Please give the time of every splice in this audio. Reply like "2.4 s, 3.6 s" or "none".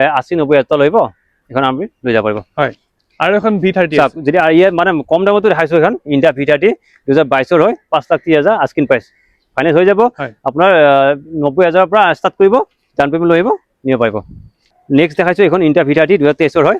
none

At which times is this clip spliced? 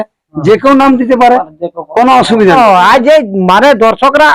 2.5 s

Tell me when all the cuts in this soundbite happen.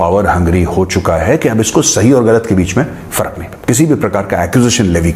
3.5 s

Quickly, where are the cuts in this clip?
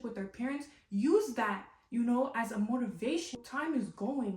3.3 s

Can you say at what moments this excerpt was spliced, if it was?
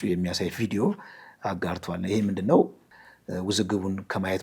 2.8 s

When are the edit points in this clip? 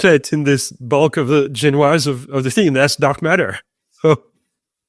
none

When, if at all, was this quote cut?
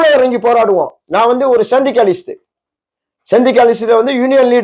none

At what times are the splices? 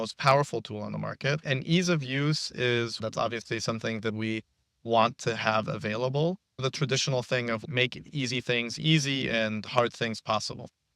2.9 s, 6.6 s, 7.6 s

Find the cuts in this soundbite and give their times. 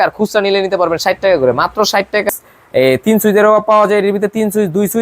2.3 s

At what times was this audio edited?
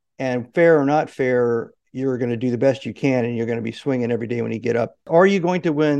5.0 s

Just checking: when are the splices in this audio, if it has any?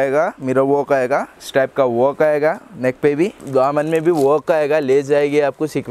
1.4 s, 3.4 s

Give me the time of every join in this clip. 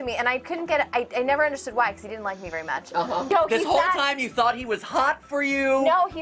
3.3 s

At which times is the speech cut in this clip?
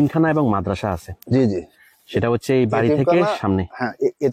none

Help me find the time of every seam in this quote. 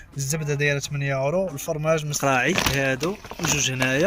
2.1 s

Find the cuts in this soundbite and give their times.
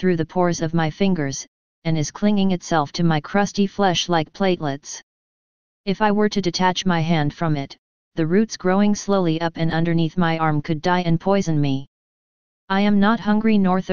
none

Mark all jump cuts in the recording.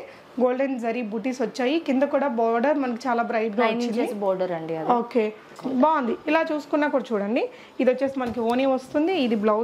5.5 s

